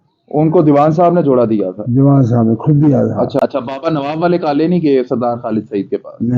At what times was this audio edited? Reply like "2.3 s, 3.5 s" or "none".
3.4 s

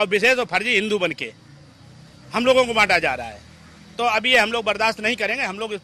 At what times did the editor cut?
none

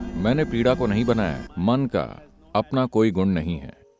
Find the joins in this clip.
1.5 s

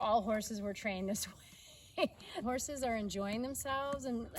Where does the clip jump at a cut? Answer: 2.4 s

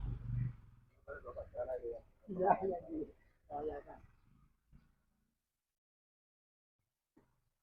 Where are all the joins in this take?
none

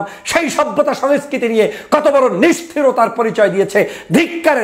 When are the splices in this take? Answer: none

